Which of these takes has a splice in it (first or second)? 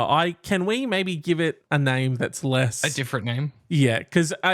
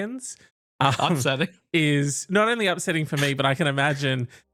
first